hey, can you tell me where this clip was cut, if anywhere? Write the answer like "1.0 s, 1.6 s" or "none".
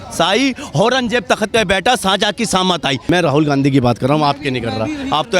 3.1 s